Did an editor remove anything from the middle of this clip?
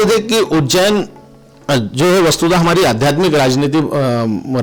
no; 0 cuts

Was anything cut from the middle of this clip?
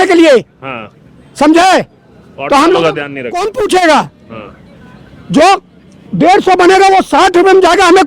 no; 0 cuts

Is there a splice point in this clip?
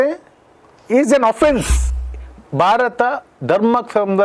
yes; 1 cut; at 1.9 s

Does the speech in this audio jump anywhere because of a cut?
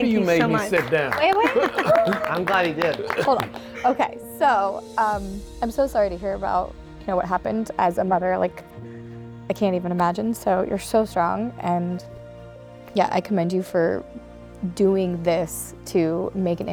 no; 0 cuts

